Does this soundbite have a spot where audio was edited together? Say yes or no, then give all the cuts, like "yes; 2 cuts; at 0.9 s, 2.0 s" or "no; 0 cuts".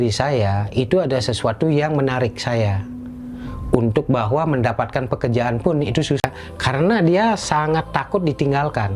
yes; 1 cut; at 6.2 s